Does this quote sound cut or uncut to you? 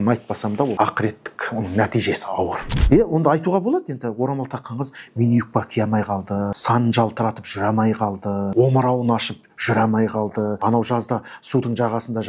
cut